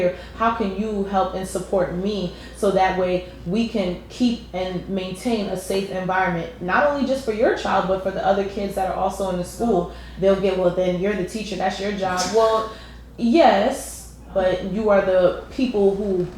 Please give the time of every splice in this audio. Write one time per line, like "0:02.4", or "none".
0:10.0
0:14.3